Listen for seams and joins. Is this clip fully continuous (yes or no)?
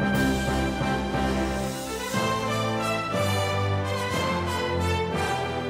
yes